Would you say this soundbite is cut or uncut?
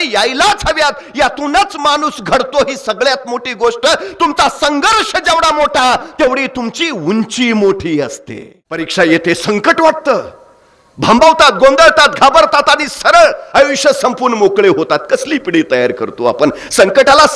cut